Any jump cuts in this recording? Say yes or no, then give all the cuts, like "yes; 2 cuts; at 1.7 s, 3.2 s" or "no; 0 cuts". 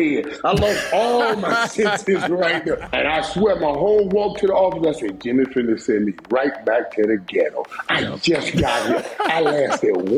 yes; 1 cut; at 2.9 s